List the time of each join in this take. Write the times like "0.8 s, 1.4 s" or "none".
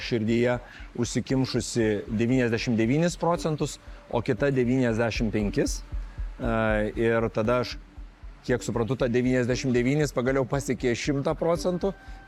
none